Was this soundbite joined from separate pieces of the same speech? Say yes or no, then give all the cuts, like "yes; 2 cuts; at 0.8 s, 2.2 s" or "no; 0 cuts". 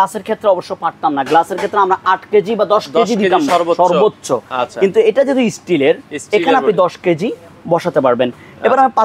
no; 0 cuts